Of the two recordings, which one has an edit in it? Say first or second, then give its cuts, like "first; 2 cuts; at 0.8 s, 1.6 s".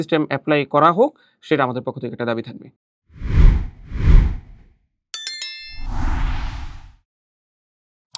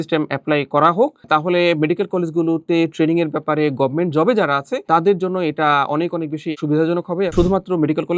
second; 3 cuts; at 1.2 s, 6.5 s, 7.3 s